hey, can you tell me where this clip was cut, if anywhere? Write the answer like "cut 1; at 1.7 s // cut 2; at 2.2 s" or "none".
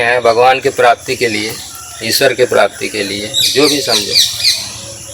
none